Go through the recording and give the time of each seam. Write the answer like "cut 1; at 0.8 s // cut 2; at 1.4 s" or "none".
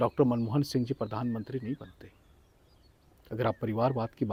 none